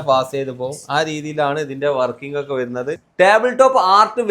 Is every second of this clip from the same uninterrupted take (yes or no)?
no